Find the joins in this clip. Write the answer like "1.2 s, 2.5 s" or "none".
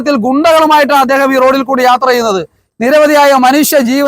2.6 s